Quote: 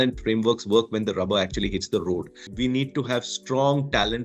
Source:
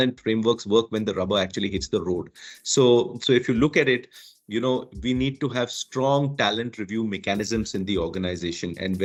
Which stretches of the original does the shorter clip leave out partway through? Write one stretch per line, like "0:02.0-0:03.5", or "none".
0:02.5-0:04.9